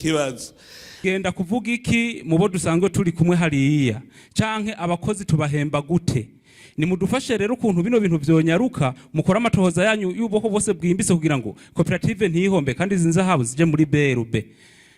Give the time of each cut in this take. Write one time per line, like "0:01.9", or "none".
0:01.0

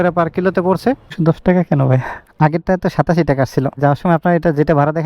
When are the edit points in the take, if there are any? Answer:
0:01.2
0:02.2
0:03.8

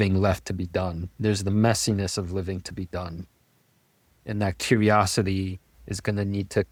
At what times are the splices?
none

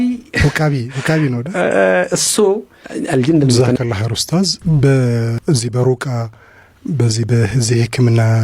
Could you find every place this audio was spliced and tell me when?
0:03.6

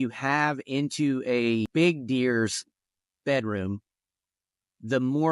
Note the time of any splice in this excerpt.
0:01.7

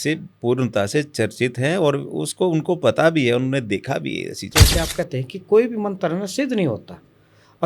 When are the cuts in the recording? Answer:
0:04.4

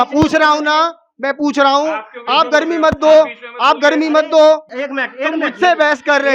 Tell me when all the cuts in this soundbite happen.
0:04.8

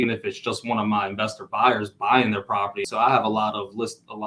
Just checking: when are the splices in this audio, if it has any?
0:02.8

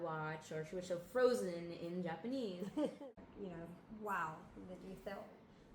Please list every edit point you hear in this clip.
0:03.0

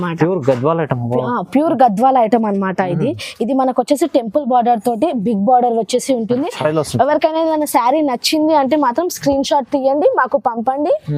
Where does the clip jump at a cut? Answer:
0:06.6

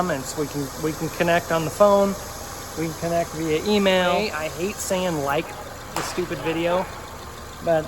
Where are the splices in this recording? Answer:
0:04.2

